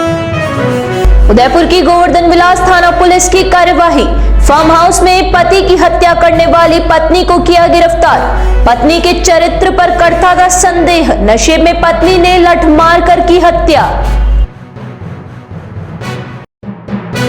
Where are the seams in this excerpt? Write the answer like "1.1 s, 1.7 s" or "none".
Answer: 1.0 s